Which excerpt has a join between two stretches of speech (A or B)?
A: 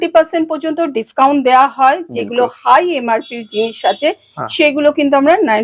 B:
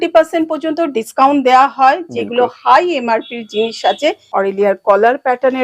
B